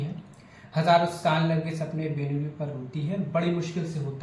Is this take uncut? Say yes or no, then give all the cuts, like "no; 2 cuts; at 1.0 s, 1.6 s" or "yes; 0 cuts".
yes; 0 cuts